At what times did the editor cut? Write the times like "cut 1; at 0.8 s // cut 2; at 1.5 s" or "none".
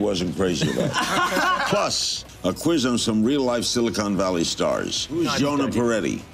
cut 1; at 1.9 s // cut 2; at 5.1 s

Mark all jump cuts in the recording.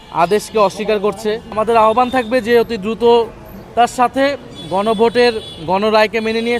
cut 1; at 1.5 s

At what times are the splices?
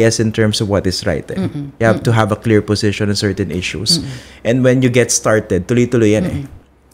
none

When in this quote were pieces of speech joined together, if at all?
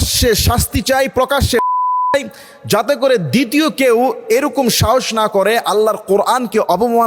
none

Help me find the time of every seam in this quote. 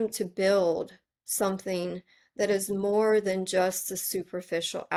none

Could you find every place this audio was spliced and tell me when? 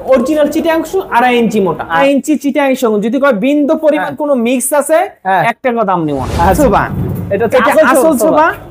cut 1; at 1.9 s // cut 2; at 6.6 s

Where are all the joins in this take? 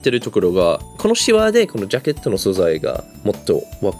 cut 1; at 0.9 s

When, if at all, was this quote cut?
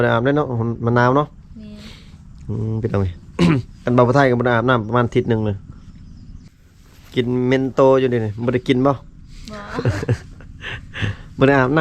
cut 1; at 6.5 s

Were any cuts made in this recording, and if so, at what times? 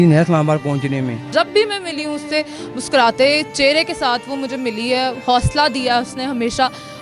cut 1; at 1.2 s

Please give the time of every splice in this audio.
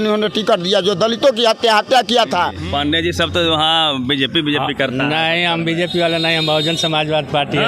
cut 1; at 2.6 s

